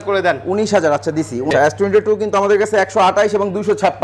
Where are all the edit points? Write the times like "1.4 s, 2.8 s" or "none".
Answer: 1.5 s